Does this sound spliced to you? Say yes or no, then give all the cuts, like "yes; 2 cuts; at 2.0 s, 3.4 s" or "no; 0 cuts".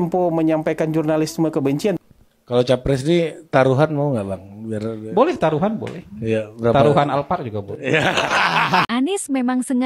yes; 2 cuts; at 2.0 s, 8.8 s